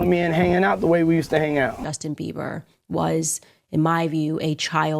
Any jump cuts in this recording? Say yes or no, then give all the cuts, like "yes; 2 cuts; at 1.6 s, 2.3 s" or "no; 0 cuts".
yes; 1 cut; at 1.9 s